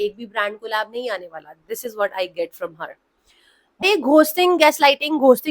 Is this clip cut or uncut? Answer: cut